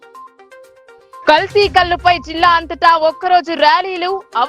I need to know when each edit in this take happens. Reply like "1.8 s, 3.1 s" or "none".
1.2 s